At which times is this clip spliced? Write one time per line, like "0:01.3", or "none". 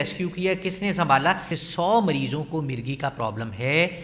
0:01.5